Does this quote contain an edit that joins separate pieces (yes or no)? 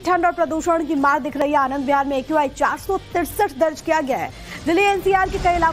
yes